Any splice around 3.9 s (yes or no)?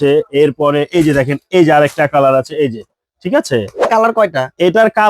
yes